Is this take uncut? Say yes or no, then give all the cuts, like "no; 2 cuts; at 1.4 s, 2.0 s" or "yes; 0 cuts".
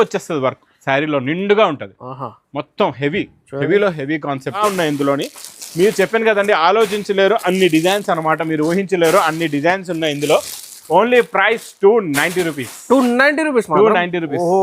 no; 1 cut; at 4.6 s